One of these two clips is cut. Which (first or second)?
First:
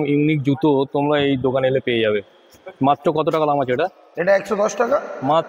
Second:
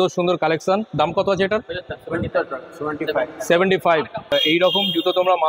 second